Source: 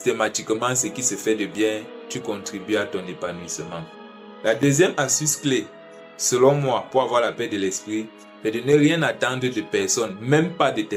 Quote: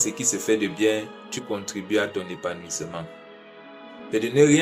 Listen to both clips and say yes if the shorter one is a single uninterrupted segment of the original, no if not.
no